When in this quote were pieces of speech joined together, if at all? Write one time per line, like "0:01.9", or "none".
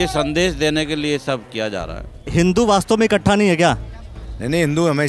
none